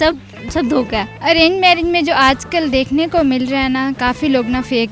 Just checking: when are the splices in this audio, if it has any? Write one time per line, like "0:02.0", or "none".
0:01.1